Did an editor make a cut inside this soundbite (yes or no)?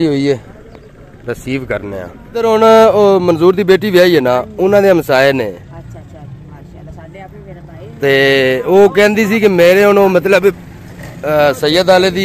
yes